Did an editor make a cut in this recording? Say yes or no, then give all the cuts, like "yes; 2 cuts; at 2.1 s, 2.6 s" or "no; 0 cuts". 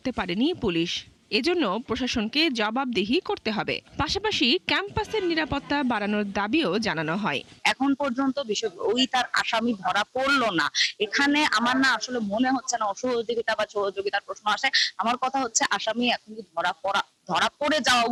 no; 0 cuts